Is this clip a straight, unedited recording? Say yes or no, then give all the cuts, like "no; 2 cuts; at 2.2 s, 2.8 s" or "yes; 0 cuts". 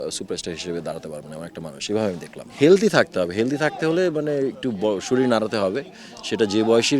no; 1 cut; at 2.5 s